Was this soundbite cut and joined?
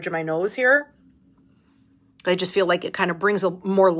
no; 0 cuts

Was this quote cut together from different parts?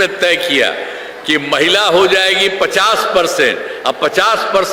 no; 0 cuts

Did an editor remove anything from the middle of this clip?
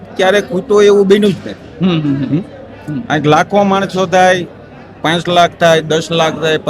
no; 0 cuts

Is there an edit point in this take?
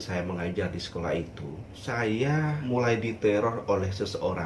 yes; 2 cuts; at 1.7 s, 2.6 s

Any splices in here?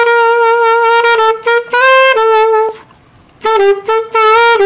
no; 0 cuts

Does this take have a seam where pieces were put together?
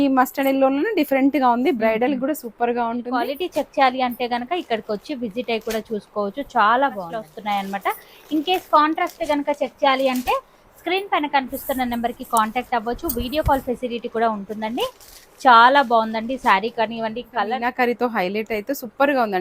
yes; 3 cuts; at 3.4 s, 7.3 s, 17.5 s

